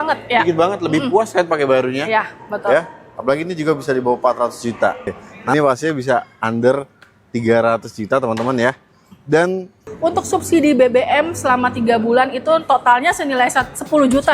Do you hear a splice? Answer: yes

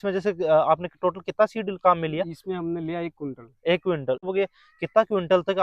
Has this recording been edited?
yes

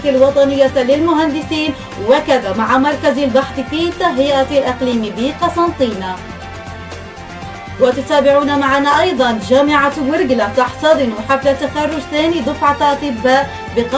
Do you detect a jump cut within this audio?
no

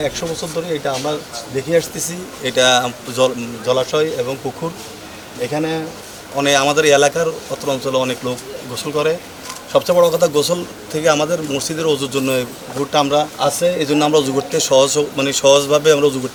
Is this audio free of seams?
yes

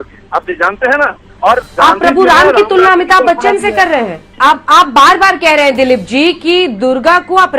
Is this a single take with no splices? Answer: no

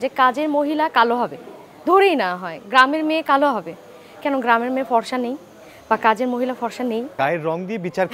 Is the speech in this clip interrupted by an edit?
no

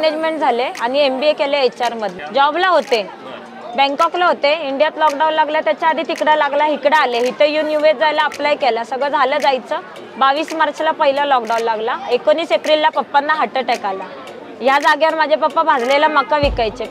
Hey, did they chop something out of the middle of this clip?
yes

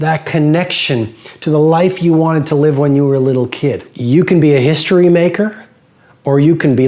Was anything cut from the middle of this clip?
yes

